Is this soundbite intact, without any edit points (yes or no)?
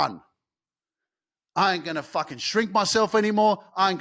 yes